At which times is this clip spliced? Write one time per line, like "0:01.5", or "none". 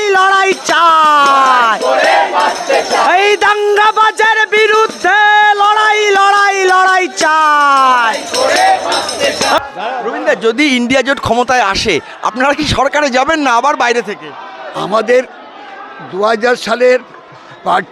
none